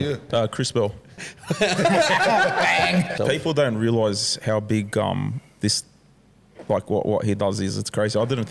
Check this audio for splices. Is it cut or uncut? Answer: cut